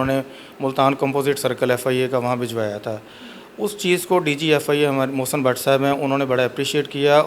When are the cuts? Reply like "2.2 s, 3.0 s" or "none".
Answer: none

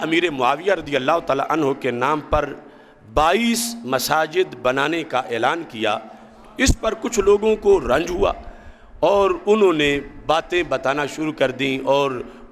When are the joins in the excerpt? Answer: none

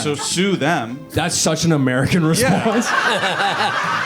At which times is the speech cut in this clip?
1.0 s

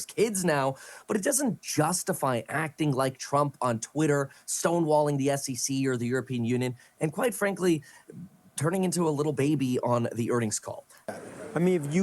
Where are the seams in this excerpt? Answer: 11.0 s

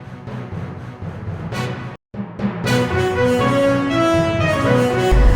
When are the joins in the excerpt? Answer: 1.6 s

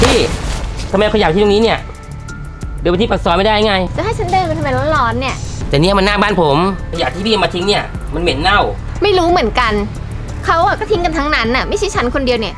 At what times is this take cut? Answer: 3.9 s, 5.4 s, 6.9 s, 8.8 s

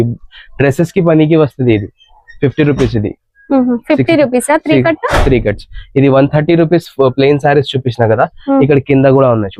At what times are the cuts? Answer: none

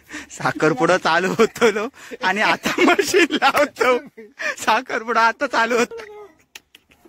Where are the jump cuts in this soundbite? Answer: 5.9 s

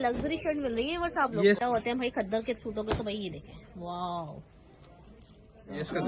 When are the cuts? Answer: 1.6 s

